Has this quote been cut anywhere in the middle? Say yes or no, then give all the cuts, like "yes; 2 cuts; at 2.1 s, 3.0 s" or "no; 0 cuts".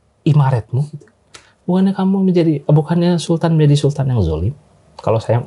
no; 0 cuts